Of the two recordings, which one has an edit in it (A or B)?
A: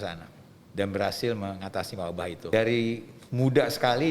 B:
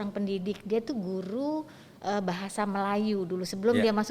A